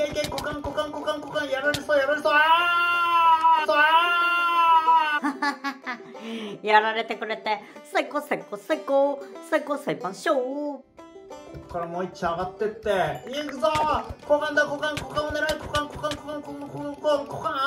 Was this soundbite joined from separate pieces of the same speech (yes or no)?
no